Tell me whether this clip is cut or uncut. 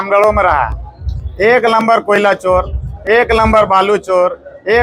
uncut